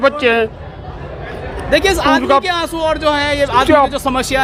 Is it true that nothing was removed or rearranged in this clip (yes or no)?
yes